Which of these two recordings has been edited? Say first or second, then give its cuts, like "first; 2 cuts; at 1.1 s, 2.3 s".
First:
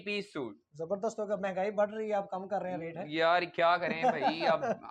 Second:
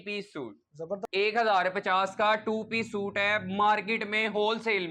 second; 1 cut; at 1.0 s